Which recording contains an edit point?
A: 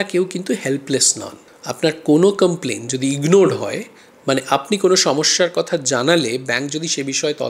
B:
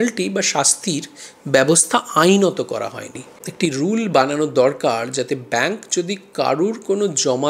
B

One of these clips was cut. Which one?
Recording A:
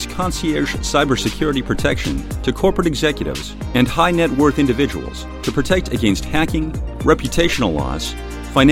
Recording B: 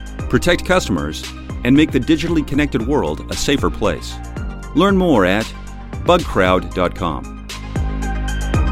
B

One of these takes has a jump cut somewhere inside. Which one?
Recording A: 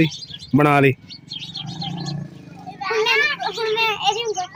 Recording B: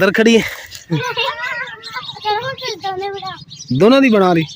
B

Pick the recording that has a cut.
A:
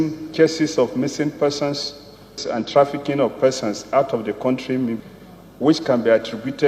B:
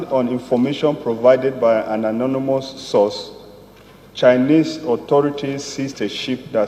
A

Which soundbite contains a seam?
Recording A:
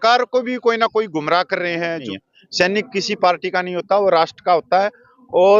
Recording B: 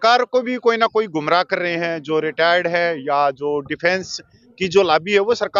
A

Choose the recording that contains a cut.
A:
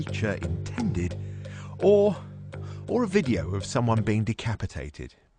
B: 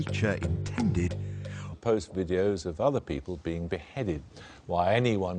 A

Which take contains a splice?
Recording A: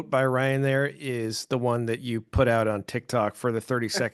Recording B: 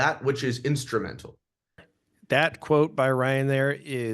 B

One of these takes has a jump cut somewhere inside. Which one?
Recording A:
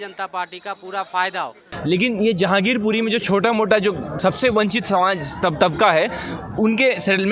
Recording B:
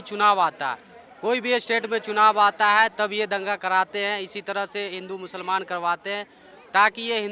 A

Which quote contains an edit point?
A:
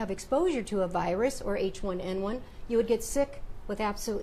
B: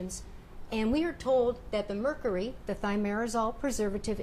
B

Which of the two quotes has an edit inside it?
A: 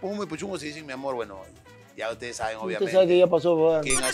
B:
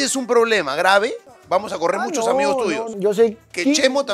B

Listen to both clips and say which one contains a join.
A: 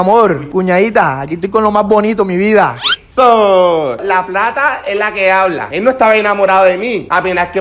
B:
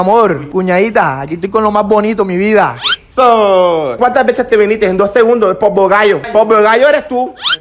B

